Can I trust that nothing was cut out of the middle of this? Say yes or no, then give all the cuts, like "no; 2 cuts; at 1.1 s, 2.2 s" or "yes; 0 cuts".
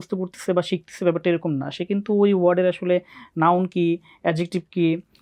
yes; 0 cuts